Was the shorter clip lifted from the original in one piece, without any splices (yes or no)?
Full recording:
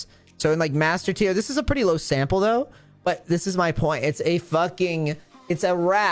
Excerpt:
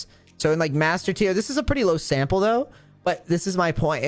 yes